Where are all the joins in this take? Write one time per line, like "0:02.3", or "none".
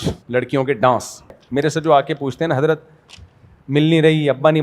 0:01.4